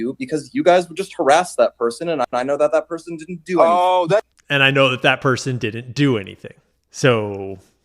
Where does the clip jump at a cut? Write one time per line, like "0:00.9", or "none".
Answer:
0:02.3